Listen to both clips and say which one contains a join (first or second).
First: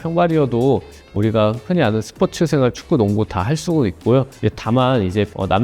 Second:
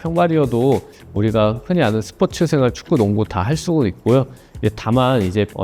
first